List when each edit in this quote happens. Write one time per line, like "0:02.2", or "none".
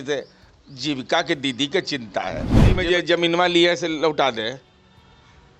0:02.7